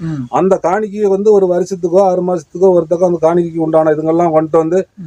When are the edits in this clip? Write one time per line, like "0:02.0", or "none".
none